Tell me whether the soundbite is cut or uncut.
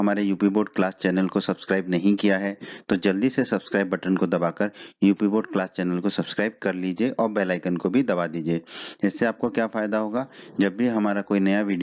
uncut